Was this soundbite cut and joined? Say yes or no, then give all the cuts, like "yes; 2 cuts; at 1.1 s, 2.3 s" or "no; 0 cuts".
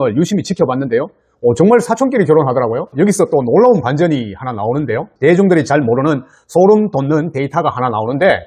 yes; 1 cut; at 2.9 s